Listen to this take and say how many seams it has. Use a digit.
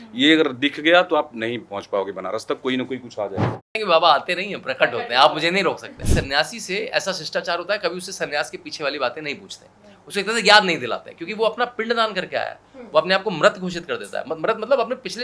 2